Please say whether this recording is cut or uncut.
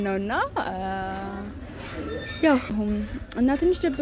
uncut